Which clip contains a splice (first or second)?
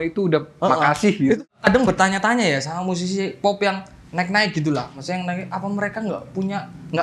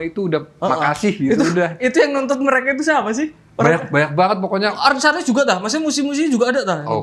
first